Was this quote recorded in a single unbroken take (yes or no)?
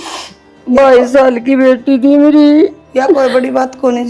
yes